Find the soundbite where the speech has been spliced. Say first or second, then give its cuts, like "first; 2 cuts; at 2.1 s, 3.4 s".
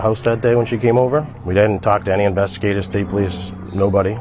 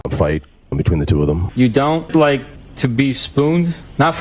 second; 1 cut; at 1.5 s